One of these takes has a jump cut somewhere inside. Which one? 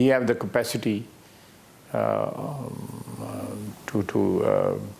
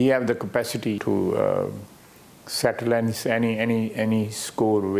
second; 1 cut; at 1.0 s

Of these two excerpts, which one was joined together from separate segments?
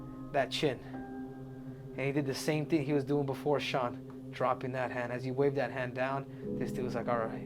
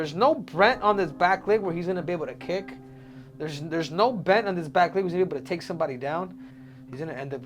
second; 1 cut; at 6.5 s

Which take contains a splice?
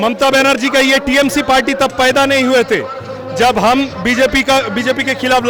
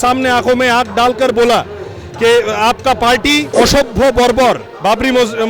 second; 1 cut; at 3.5 s

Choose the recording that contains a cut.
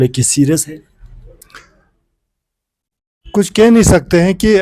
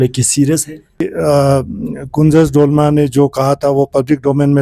second; 1 cut; at 1.0 s

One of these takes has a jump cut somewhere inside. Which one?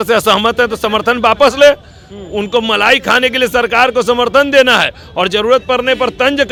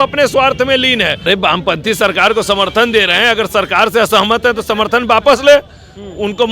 second; 1 cut; at 1.2 s

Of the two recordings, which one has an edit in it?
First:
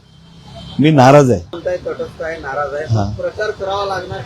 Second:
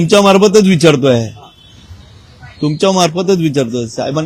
first; 1 cut; at 1.6 s

